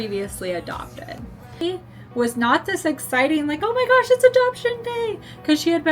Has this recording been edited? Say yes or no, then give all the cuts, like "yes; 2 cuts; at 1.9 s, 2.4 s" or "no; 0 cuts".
yes; 1 cut; at 1.6 s